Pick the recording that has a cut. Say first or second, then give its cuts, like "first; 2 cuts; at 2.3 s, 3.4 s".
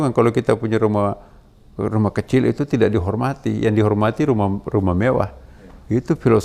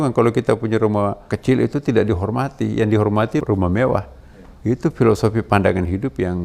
second; 2 cuts; at 1.3 s, 3.4 s